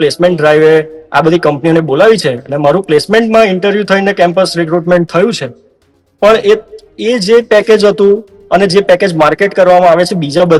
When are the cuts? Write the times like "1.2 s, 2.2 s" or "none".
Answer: none

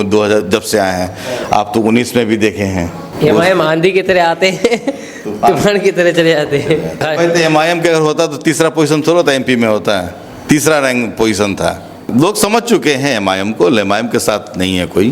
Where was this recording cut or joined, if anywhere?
3.0 s, 7.0 s, 12.0 s

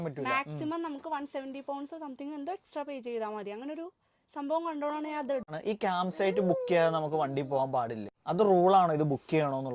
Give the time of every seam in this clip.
5.6 s, 8.1 s

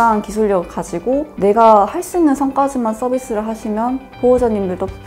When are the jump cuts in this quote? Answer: 1.3 s

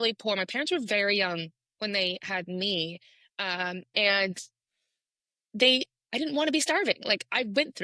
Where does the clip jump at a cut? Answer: none

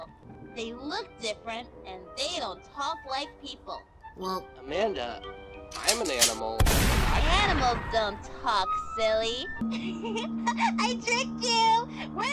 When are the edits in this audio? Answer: 9.6 s

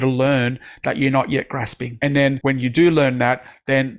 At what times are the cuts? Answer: 2.2 s

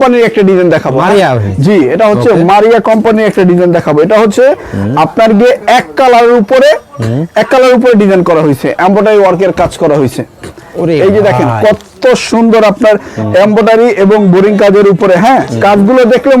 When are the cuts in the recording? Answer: none

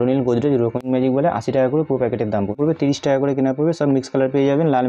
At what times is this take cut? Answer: 0.8 s, 2.6 s

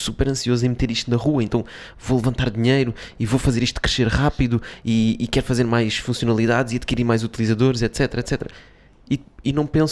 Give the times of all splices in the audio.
none

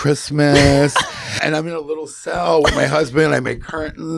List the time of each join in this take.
1.4 s

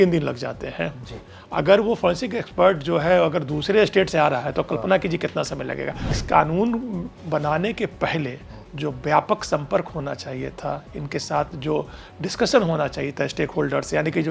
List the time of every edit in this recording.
6.2 s

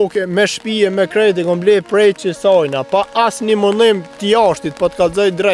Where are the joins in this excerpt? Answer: none

